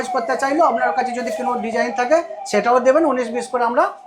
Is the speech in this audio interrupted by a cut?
no; 0 cuts

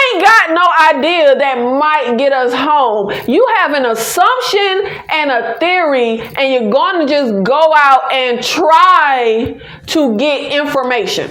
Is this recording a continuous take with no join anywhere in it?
yes; 0 cuts

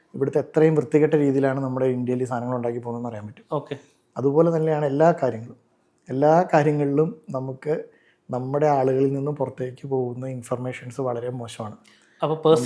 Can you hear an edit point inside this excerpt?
no; 0 cuts

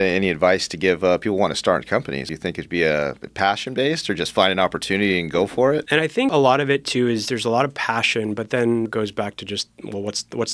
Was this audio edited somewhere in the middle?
yes; 3 cuts; at 2.3 s, 6.0 s, 8.9 s

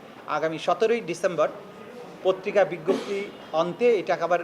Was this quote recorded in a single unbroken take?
yes; 0 cuts

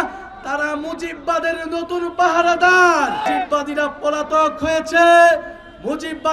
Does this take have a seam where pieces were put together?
yes; 1 cut; at 3.3 s

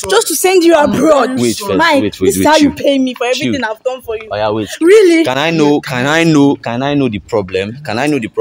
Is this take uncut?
yes; 0 cuts

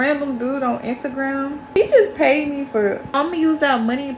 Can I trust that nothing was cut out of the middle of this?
no; 2 cuts; at 1.8 s, 3.1 s

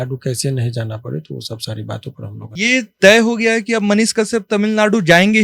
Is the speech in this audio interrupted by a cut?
yes; 1 cut; at 2.6 s

